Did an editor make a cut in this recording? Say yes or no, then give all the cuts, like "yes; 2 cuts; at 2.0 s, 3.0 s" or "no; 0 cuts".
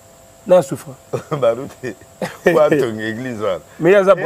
no; 0 cuts